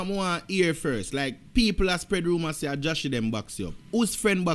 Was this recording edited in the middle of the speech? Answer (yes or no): no